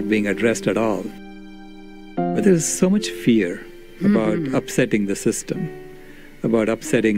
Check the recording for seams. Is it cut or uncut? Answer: cut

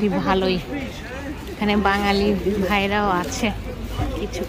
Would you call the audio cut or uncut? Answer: uncut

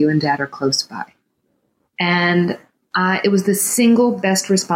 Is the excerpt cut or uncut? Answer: uncut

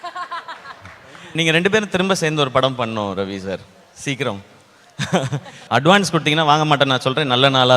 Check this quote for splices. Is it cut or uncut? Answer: cut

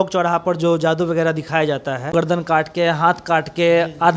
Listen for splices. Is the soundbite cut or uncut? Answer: cut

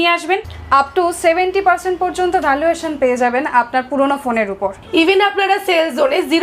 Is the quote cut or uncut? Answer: uncut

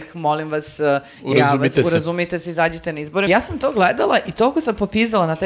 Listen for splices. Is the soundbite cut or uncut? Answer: cut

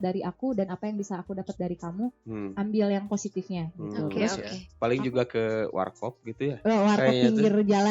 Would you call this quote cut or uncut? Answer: cut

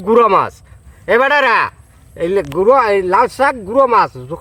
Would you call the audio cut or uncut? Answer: uncut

